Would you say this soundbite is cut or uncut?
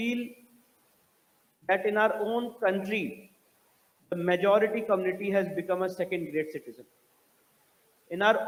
uncut